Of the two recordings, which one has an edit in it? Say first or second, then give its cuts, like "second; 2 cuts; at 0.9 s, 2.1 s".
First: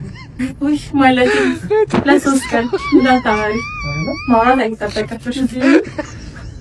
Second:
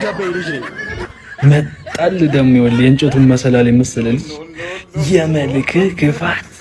second; 1 cut; at 1.0 s